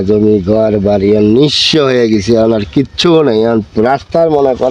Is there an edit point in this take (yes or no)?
no